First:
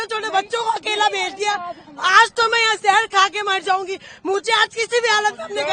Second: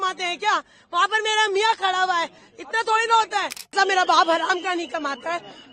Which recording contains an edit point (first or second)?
second